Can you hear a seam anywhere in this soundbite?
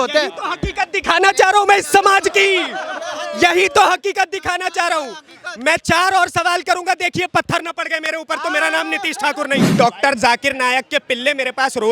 yes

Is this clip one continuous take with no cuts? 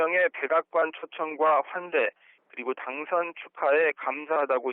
no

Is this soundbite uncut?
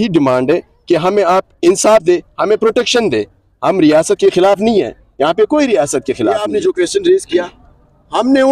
no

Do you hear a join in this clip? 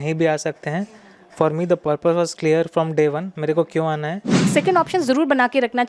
yes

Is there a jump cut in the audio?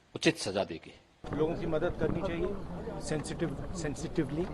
yes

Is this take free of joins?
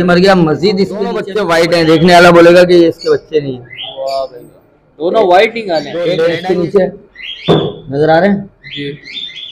no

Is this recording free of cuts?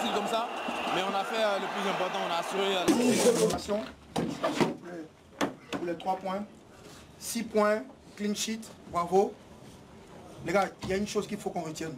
no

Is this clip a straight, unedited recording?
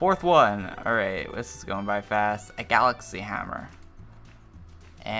yes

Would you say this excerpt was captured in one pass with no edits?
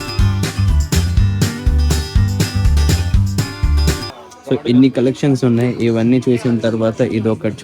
no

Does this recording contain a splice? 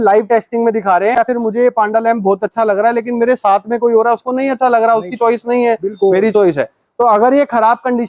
yes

